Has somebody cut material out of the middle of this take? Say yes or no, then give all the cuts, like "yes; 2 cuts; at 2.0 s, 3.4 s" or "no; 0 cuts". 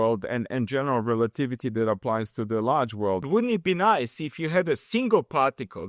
yes; 1 cut; at 3.3 s